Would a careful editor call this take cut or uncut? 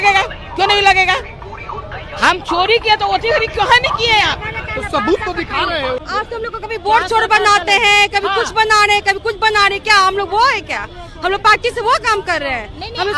cut